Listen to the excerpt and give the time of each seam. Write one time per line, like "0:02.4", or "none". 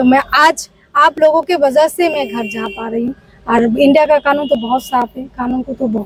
none